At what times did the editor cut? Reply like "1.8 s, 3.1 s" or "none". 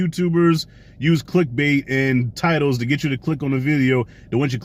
none

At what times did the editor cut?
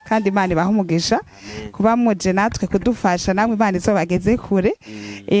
none

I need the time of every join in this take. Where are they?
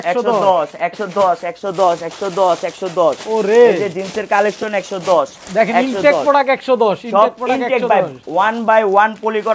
none

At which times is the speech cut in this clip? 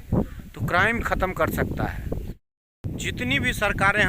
2.4 s

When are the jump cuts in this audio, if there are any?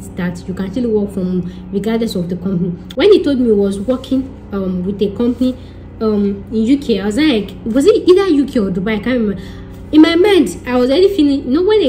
2.8 s

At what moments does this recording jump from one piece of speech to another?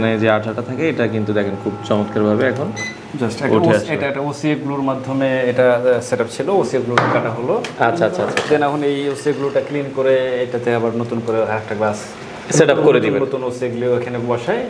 none

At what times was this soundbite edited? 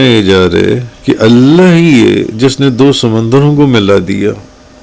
0.9 s

